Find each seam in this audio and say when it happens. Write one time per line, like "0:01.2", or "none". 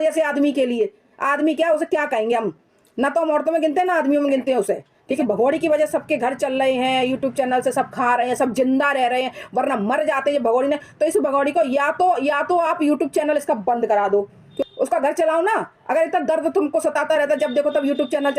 0:05.2
0:14.5